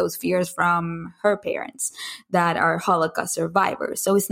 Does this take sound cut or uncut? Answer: uncut